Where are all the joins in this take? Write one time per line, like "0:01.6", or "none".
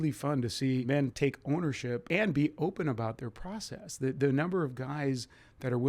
0:00.9
0:02.0

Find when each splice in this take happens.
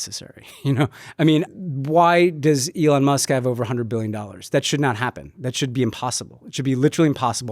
0:01.5

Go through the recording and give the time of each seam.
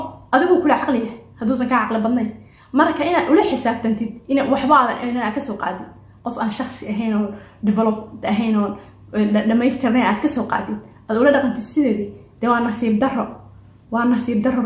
none

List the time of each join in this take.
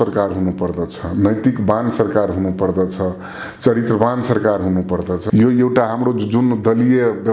0:05.2

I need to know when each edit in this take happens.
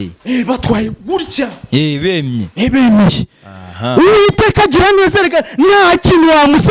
none

